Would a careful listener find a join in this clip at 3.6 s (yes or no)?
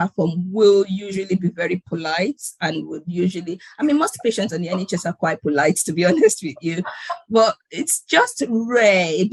no